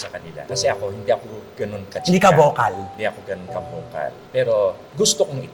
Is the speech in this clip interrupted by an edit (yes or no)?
no